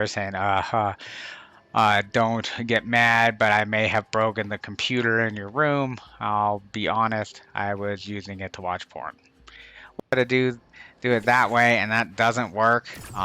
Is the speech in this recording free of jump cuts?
no; 1 cut; at 10.1 s

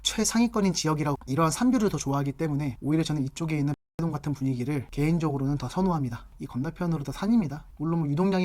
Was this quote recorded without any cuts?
no; 2 cuts; at 1.2 s, 6.3 s

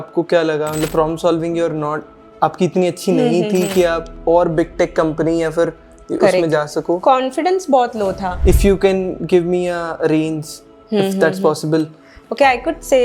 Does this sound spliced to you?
yes; 1 cut; at 8.3 s

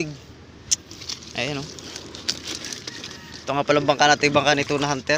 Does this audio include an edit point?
no; 0 cuts

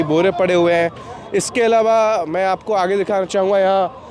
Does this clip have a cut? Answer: no; 0 cuts

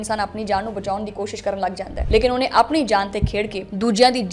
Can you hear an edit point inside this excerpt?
no; 0 cuts

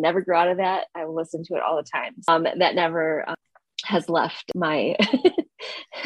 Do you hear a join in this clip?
yes; 3 cuts; at 2.3 s, 3.4 s, 4.5 s

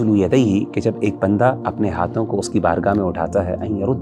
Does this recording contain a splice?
yes; 1 cut; at 1.6 s

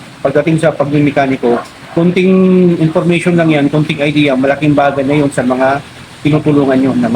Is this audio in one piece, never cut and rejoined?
yes; 0 cuts

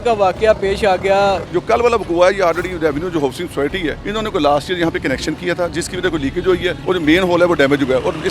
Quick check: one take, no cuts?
no; 3 cuts; at 1.4 s, 4.0 s, 6.8 s

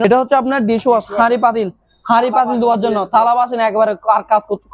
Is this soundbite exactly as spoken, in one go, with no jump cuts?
yes; 0 cuts

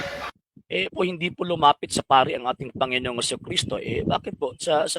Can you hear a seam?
yes; 1 cut; at 0.9 s

